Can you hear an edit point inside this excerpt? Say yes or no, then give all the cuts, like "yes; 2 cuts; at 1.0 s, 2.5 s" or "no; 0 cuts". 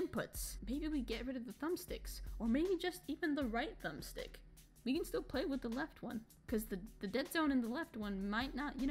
no; 0 cuts